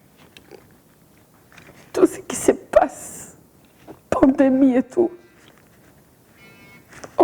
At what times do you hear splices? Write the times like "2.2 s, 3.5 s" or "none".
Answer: 1.3 s